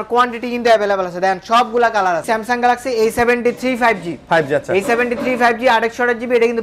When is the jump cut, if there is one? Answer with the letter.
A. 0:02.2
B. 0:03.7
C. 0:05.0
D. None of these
A